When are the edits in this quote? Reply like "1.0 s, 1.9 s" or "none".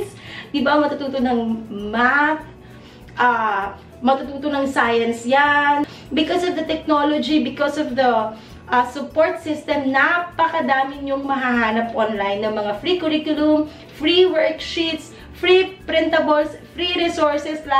6.0 s